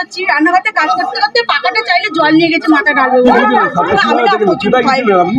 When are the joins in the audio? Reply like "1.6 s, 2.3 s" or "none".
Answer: 3.3 s

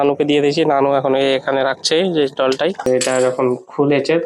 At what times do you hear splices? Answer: 2.9 s

